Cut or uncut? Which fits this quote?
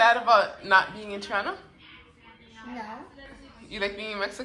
uncut